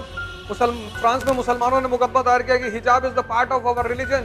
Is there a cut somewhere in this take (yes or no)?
no